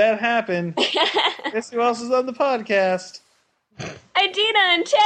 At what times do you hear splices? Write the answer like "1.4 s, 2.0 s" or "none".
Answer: none